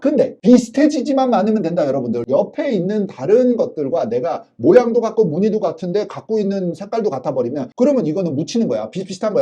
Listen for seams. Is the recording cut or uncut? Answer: uncut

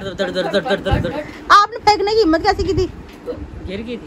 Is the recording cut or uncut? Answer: cut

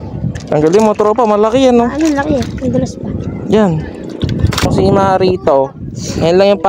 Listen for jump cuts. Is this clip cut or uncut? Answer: cut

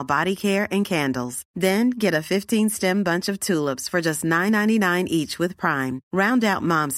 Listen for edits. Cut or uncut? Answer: uncut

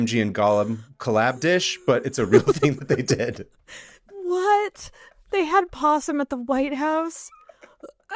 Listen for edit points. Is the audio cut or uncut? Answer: uncut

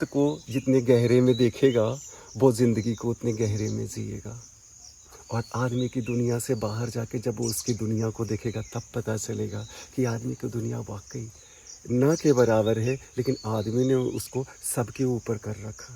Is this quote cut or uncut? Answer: uncut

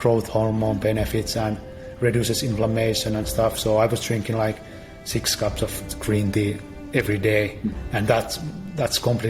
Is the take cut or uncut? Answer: uncut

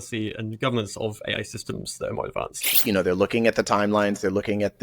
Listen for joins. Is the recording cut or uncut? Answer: cut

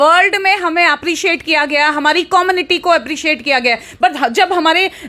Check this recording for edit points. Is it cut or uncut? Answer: uncut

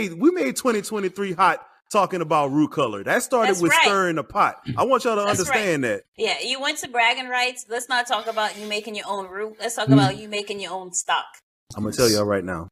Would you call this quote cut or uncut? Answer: cut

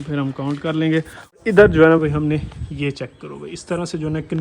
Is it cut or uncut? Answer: cut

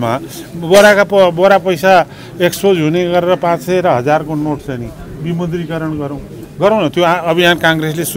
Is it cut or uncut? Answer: cut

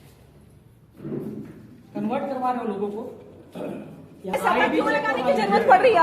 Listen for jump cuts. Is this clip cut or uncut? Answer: cut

